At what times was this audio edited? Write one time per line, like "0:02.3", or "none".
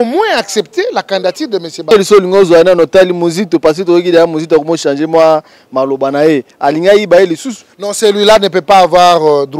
0:01.9

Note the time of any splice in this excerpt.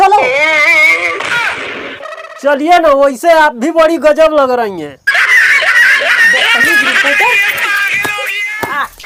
none

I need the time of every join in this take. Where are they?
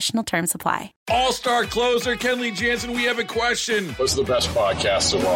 0:00.9

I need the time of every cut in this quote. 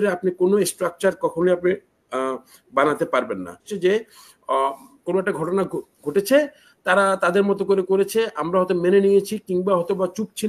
0:03.7

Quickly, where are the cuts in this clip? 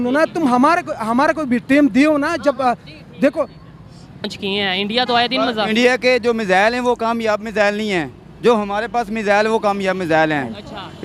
0:04.2

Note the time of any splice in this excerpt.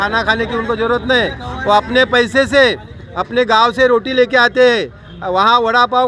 none

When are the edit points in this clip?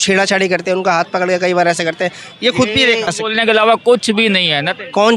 0:03.2

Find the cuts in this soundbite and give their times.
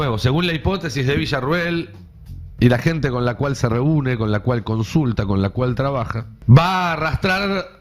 0:06.3

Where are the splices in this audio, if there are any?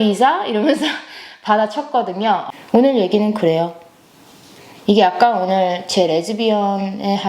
0:02.4

